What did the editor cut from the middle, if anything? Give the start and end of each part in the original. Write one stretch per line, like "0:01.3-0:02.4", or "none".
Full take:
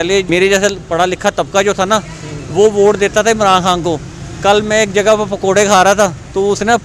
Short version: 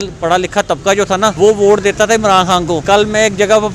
0:02.0-0:02.5
0:04.0-0:04.4